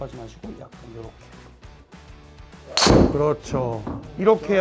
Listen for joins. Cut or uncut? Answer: uncut